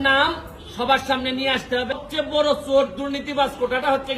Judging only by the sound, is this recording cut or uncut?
cut